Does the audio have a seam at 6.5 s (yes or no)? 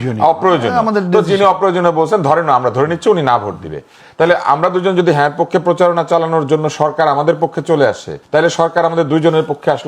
no